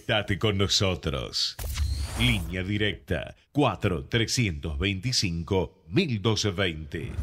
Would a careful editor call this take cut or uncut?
uncut